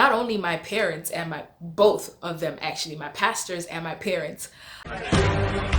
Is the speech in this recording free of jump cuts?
no; 1 cut; at 4.9 s

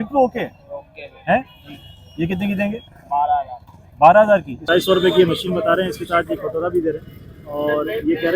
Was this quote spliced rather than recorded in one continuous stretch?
yes; 1 cut; at 4.6 s

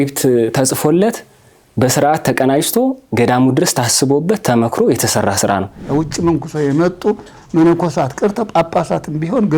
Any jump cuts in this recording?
yes; 1 cut; at 5.8 s

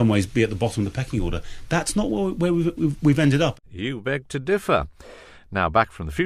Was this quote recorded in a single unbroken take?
no; 1 cut; at 2.3 s

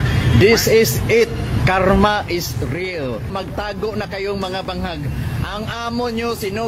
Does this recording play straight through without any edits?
no; 1 cut; at 3.3 s

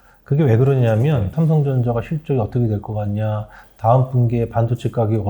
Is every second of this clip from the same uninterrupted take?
no; 1 cut; at 1.3 s

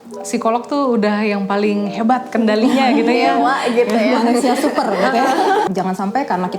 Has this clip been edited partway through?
yes; 1 cut; at 5.7 s

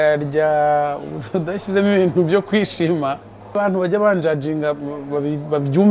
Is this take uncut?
no; 1 cut; at 3.5 s

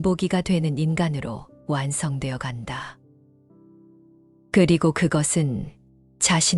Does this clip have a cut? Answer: yes; 2 cuts; at 3.0 s, 4.5 s

